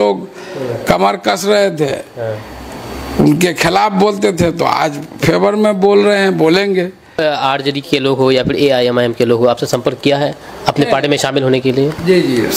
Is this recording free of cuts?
no; 1 cut; at 7.2 s

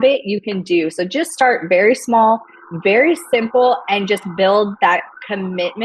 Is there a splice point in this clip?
no; 0 cuts

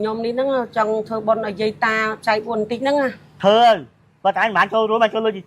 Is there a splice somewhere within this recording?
yes; 1 cut; at 3.2 s

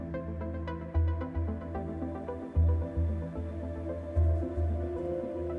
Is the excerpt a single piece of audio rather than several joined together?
yes; 0 cuts

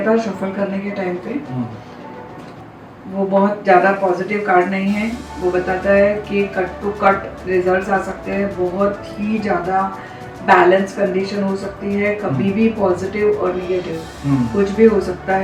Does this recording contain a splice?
no; 0 cuts

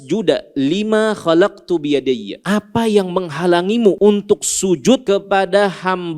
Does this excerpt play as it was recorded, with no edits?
no; 3 cuts; at 2.3 s, 4.0 s, 5.0 s

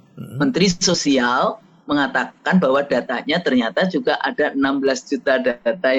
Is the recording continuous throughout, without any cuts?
yes; 0 cuts

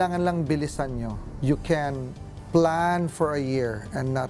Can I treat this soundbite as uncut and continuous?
no; 1 cut; at 1.3 s

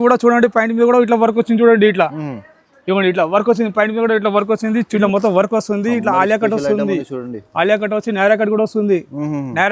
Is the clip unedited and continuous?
no; 1 cut; at 5.0 s

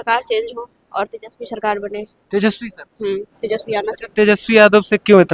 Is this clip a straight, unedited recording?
no; 1 cut; at 3.3 s

